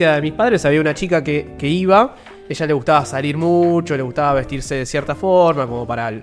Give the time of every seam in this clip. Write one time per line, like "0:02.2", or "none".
none